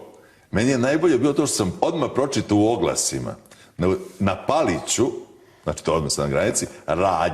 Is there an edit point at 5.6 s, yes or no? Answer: no